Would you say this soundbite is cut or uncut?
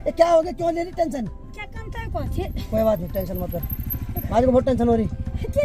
uncut